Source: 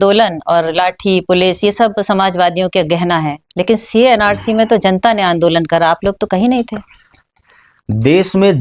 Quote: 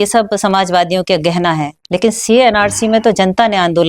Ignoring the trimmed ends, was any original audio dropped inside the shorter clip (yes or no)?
no